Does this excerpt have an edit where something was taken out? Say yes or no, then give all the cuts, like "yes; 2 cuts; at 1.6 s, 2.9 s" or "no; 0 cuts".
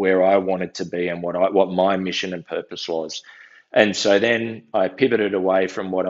no; 0 cuts